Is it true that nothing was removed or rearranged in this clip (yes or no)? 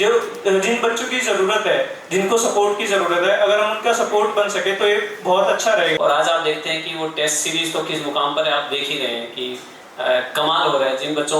no